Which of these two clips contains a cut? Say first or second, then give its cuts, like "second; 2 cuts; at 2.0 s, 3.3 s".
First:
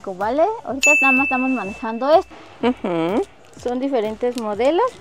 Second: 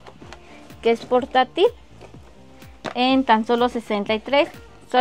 first; 1 cut; at 2.3 s